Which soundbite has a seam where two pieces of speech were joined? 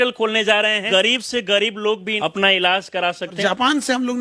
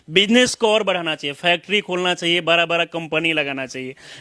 first; 3 cuts; at 0.8 s, 2.1 s, 3.4 s

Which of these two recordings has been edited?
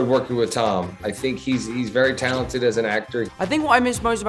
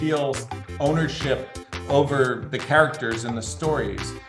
first; 1 cut; at 3.3 s

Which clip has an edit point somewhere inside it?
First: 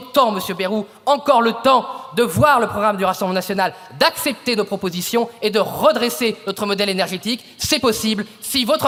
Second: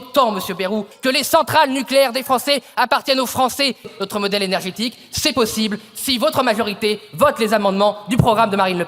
second; 2 cuts; at 0.9 s, 3.9 s

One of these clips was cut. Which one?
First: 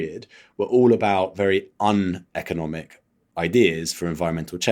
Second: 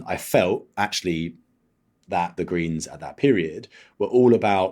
second; 1 cut; at 2.3 s

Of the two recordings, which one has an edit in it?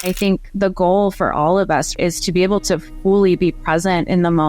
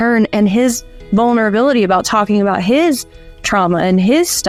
first; 1 cut; at 2.0 s

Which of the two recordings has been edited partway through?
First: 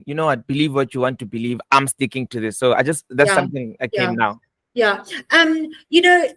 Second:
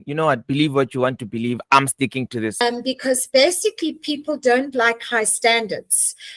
second; 1 cut; at 2.6 s

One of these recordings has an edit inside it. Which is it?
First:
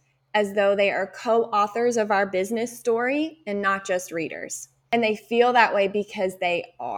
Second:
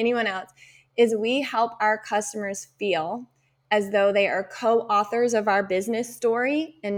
first; 1 cut; at 4.7 s

